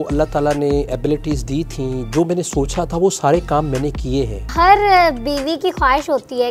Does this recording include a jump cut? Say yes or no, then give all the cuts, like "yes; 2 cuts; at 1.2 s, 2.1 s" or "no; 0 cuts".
yes; 1 cut; at 4.4 s